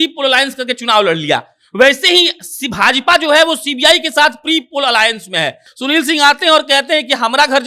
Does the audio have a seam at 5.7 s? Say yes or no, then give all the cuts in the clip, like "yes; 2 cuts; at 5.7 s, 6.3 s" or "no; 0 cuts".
yes; 1 cut; at 5.7 s